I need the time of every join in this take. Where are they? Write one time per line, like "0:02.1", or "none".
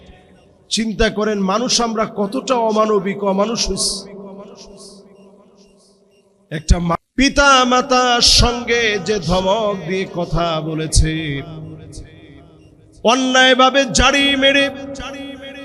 0:06.9